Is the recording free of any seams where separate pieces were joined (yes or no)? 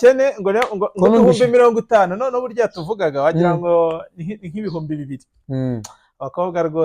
yes